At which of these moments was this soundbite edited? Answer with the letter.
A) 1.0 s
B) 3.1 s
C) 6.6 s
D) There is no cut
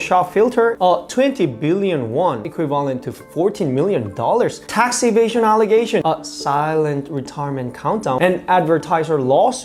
D